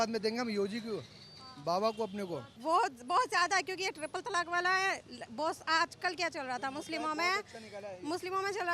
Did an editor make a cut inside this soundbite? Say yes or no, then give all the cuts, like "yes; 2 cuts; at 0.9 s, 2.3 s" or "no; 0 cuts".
yes; 1 cut; at 2.5 s